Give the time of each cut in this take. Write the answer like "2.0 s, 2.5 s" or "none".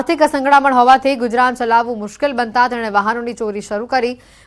1.2 s